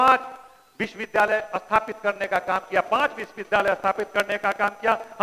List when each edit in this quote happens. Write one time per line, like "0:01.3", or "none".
none

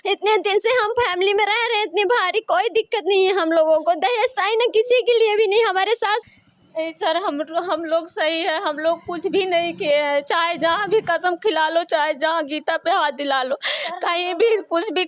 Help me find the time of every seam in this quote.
0:06.2

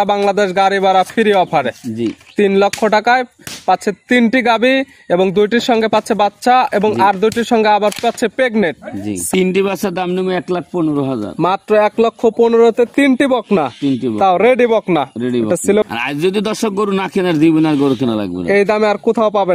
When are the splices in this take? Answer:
0:09.3
0:15.9

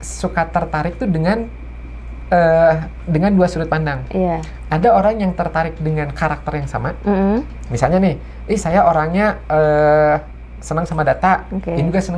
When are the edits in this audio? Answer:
none

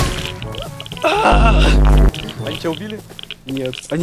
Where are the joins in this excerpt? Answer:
none

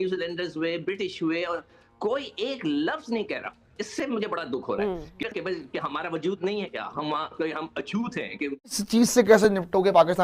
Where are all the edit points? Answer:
0:05.2
0:08.7

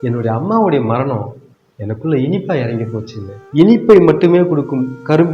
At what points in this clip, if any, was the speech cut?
0:03.3

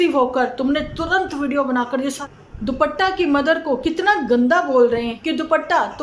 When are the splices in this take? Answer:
0:02.2
0:05.2

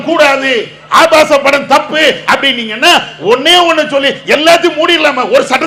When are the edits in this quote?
none

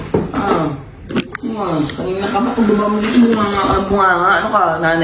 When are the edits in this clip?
none

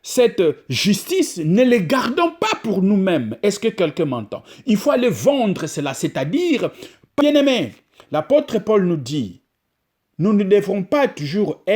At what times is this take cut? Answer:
0:07.2

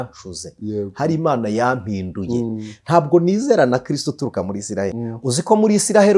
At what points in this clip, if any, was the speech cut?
0:05.0

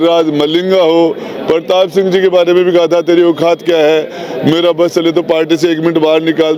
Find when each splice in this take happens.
none

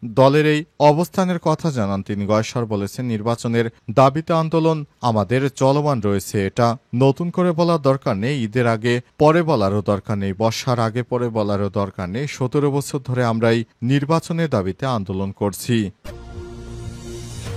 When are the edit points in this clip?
0:16.0

